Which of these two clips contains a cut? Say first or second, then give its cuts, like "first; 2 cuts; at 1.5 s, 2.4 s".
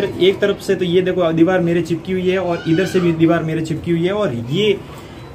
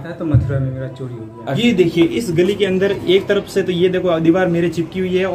second; 1 cut; at 1.5 s